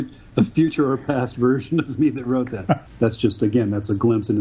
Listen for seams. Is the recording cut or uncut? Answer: cut